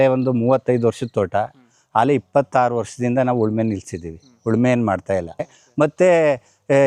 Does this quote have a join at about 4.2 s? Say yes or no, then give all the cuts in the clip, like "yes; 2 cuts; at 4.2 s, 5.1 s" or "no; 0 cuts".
no; 1 cut; at 5.6 s